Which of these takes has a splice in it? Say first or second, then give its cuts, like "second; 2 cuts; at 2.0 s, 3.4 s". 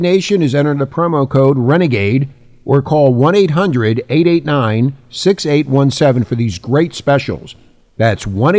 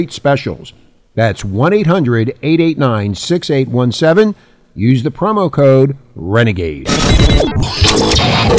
second; 1 cut; at 6.8 s